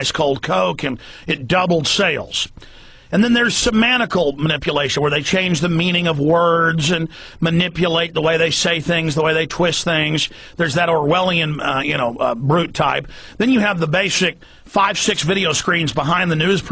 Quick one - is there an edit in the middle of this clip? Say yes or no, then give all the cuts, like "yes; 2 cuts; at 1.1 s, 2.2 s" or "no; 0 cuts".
yes; 1 cut; at 9.1 s